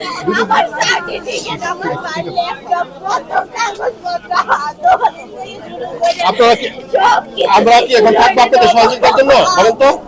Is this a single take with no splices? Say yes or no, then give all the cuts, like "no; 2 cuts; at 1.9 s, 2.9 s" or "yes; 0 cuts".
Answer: yes; 0 cuts